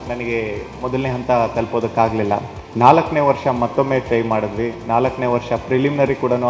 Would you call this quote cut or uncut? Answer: cut